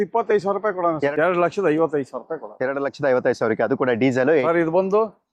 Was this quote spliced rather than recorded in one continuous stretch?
yes; 2 cuts; at 1.1 s, 4.4 s

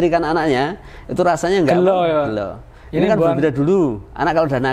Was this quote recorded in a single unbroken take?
yes; 0 cuts

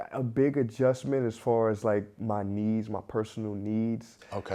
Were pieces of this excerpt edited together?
no; 0 cuts

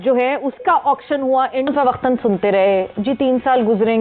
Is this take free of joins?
no; 1 cut; at 1.7 s

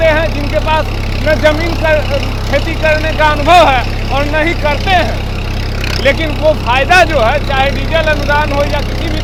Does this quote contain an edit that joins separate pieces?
no; 0 cuts

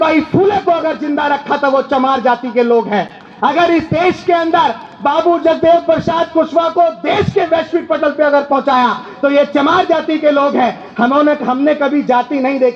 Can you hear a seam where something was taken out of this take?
no; 0 cuts

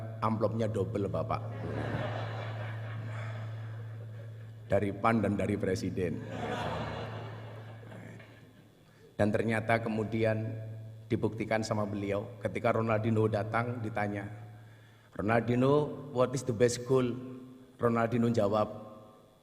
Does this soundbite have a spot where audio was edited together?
yes; 1 cut; at 8.2 s

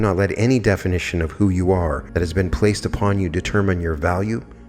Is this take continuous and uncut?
no; 1 cut; at 2.0 s

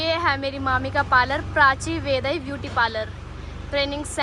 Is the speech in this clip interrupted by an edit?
no; 0 cuts

